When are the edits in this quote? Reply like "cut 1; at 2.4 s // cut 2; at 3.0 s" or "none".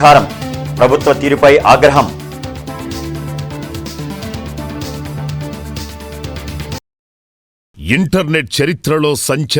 cut 1; at 7.7 s